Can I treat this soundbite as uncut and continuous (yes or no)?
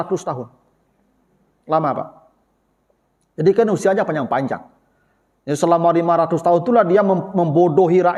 yes